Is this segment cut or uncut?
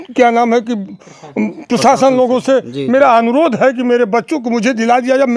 uncut